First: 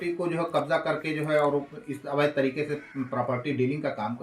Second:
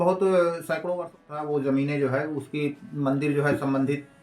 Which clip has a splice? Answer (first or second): second